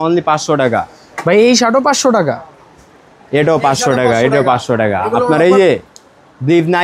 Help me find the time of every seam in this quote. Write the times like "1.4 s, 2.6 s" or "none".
none